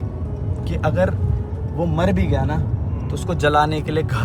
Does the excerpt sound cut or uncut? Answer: uncut